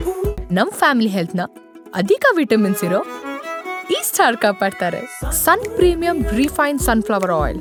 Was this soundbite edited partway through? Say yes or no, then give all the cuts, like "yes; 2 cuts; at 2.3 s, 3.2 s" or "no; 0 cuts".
no; 0 cuts